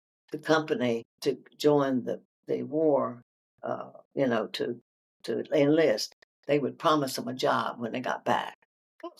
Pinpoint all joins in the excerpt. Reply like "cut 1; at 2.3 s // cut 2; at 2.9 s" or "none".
cut 1; at 1.1 s